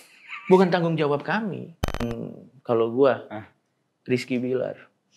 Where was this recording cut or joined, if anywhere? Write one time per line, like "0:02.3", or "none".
0:02.0

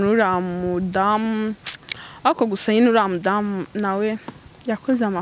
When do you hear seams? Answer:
none

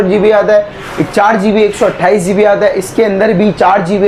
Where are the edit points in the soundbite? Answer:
none

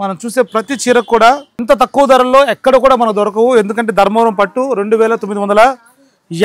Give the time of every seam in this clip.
0:01.5

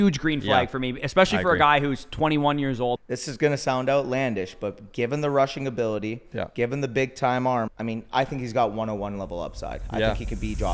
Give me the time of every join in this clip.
0:03.0
0:07.7

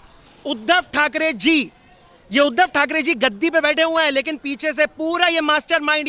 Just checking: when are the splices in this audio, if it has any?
none

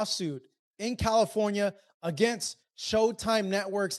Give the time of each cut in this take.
none

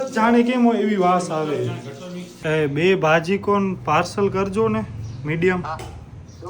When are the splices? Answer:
0:02.3

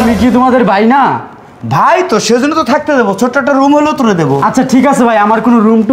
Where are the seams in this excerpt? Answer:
none

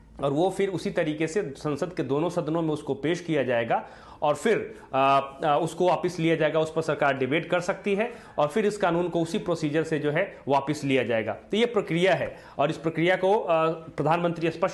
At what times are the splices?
none

